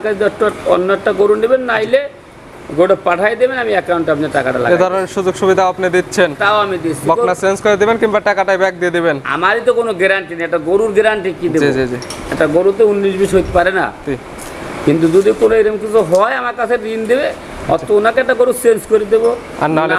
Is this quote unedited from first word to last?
yes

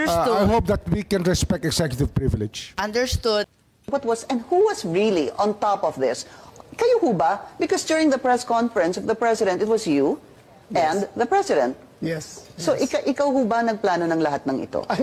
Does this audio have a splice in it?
yes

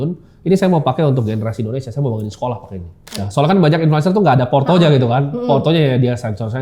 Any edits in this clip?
yes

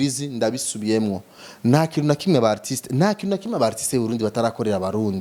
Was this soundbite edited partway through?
no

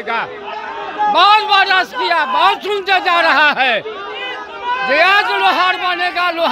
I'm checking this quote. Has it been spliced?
no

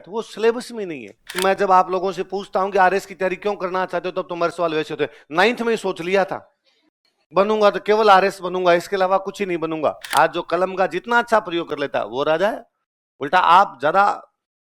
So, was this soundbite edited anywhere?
yes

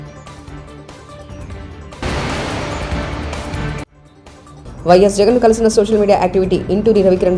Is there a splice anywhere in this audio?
yes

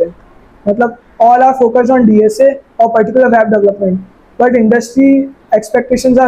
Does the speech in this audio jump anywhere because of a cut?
no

